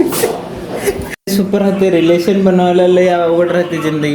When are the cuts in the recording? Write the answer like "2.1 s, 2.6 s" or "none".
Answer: 1.1 s

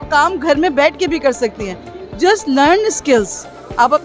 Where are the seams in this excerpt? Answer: none

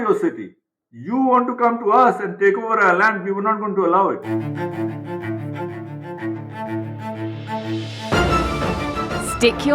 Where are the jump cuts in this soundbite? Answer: 4.2 s

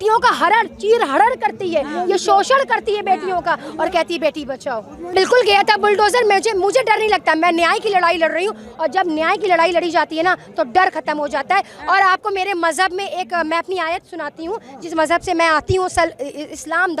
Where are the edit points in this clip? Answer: none

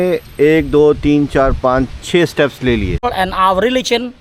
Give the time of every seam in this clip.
3.0 s

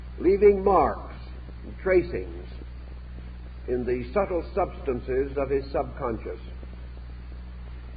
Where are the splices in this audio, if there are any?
5.5 s

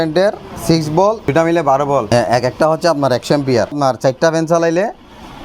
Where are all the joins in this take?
1.3 s, 2.1 s, 3.8 s

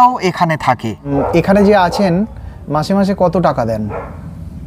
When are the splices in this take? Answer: 1.0 s

